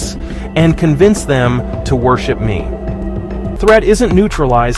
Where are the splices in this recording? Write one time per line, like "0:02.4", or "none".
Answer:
0:03.6